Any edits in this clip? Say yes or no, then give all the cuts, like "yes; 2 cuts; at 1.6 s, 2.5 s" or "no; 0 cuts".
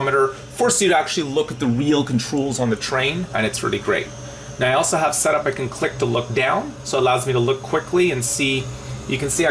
no; 0 cuts